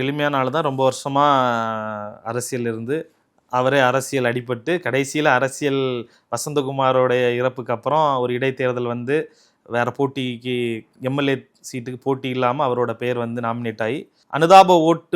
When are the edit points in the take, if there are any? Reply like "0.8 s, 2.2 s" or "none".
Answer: 14.2 s